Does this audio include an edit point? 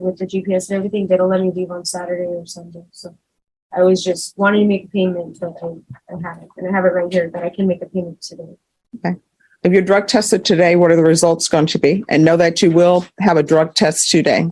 no; 0 cuts

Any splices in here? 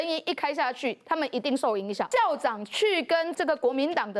yes; 2 cuts; at 2.1 s, 3.3 s

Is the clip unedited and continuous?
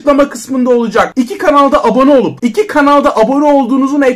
no; 2 cuts; at 1.1 s, 2.4 s

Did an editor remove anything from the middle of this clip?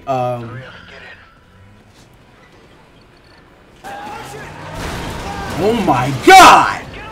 yes; 1 cut; at 3.8 s

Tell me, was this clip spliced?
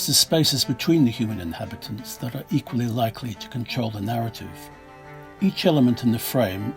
yes; 1 cut; at 5.3 s

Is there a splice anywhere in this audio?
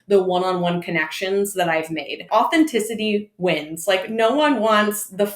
yes; 1 cut; at 2.2 s

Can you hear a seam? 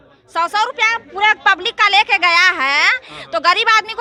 no; 0 cuts

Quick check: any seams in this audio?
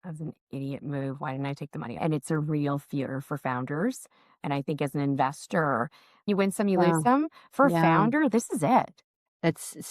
yes; 2 cuts; at 2.0 s, 6.3 s

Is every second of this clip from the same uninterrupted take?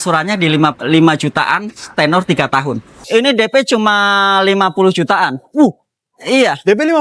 no; 1 cut; at 3.0 s

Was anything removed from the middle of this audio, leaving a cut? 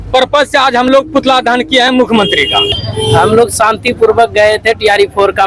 yes; 1 cut; at 2.8 s

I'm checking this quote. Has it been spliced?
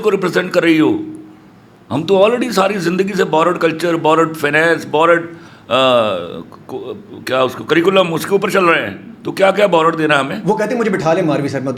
no; 0 cuts

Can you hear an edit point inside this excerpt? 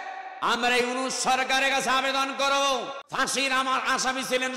yes; 1 cut; at 3.0 s

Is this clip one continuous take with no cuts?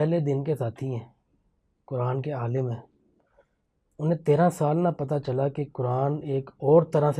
yes; 0 cuts

